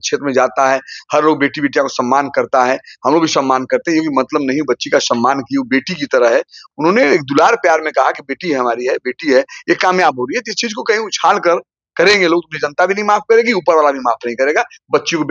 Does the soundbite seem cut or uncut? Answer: cut